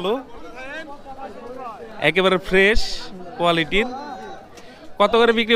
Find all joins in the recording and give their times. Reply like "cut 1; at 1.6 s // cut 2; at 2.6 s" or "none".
none